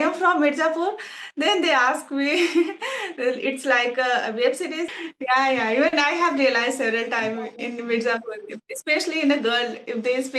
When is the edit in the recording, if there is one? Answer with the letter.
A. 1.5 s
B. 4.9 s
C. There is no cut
B